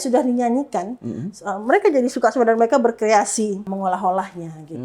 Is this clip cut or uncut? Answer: cut